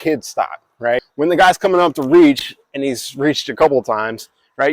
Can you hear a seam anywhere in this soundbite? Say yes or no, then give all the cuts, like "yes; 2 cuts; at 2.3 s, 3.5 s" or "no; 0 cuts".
yes; 1 cut; at 1.1 s